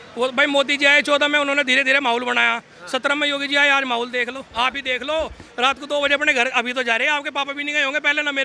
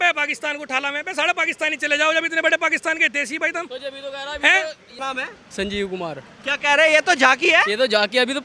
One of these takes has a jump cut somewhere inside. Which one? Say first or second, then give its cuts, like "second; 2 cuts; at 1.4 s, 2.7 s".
second; 1 cut; at 5.0 s